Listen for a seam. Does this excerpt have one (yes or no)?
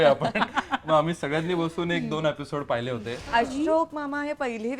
yes